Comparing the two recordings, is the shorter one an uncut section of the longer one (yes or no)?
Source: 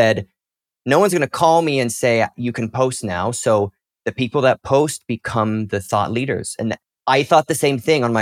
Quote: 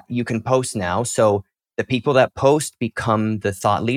yes